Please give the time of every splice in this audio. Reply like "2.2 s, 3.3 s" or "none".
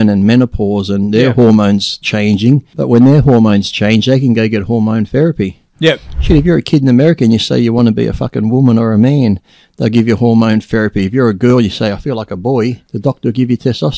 12.9 s